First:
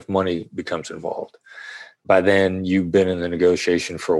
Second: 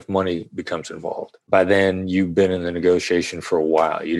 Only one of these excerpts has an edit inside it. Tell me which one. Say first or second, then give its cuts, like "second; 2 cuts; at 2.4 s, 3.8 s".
second; 1 cut; at 1.3 s